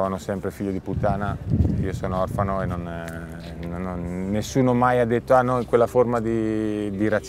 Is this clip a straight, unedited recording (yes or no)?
yes